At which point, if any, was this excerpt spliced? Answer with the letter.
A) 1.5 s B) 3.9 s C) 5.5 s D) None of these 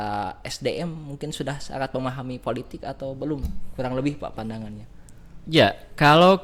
D